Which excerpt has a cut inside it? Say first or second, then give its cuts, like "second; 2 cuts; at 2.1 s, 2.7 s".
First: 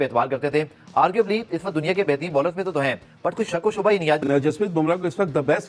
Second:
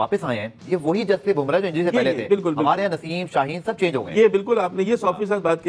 first; 1 cut; at 4.2 s